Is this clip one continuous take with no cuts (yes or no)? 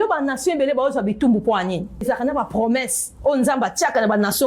no